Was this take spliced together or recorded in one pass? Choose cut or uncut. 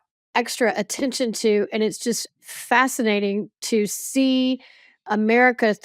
uncut